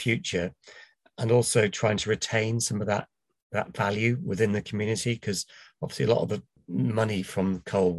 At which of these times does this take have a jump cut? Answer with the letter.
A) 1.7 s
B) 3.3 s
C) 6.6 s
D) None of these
C